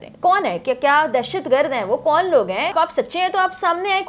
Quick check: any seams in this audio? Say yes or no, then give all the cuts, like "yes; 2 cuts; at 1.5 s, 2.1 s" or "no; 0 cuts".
yes; 1 cut; at 2.7 s